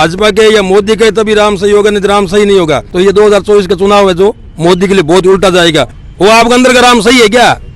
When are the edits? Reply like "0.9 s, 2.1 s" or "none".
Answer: 2.9 s, 5.9 s